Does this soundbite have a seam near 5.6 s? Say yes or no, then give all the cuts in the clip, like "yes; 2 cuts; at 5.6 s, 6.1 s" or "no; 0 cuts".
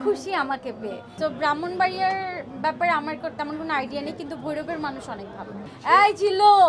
yes; 2 cuts; at 1.0 s, 5.6 s